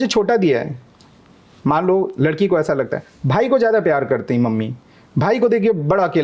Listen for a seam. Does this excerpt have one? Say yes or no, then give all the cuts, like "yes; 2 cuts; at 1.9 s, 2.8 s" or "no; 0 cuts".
no; 0 cuts